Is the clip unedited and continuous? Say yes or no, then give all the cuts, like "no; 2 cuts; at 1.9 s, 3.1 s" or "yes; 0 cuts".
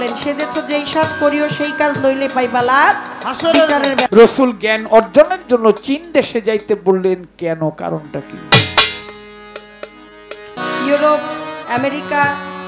no; 2 cuts; at 4.1 s, 10.6 s